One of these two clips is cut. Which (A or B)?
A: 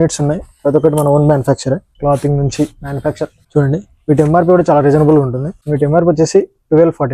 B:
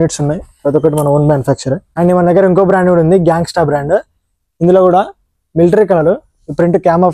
B